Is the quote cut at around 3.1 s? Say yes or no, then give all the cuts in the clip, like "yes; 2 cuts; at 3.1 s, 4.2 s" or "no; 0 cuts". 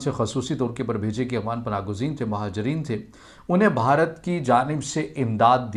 no; 0 cuts